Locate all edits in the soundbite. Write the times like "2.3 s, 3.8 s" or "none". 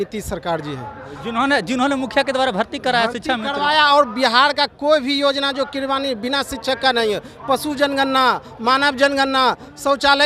none